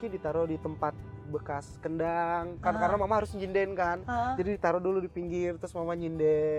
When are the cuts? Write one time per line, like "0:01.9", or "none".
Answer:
none